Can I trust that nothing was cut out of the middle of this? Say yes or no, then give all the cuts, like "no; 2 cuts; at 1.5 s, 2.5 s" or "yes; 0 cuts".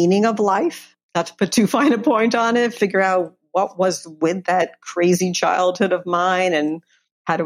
no; 1 cut; at 0.9 s